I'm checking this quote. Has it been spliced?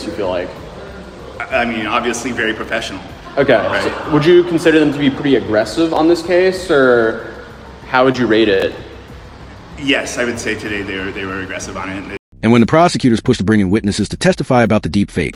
no; 0 cuts

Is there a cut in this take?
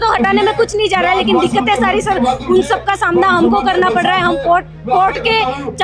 no; 0 cuts

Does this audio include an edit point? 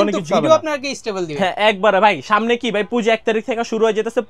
no; 0 cuts

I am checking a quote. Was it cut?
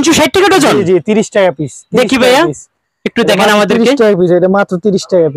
no; 0 cuts

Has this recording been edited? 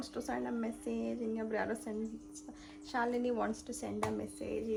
no; 0 cuts

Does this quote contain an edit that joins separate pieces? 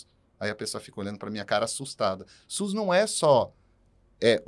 no; 0 cuts

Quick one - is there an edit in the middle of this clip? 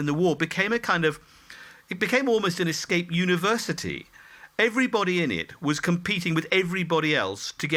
no; 0 cuts

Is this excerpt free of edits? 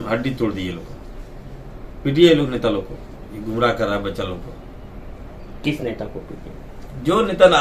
yes; 0 cuts

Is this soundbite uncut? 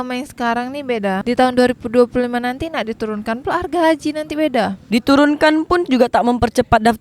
no; 1 cut; at 1.2 s

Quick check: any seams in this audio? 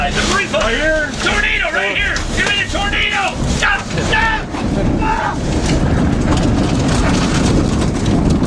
no; 0 cuts

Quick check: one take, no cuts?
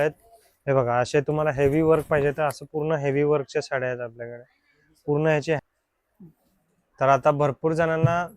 no; 1 cut; at 5.6 s

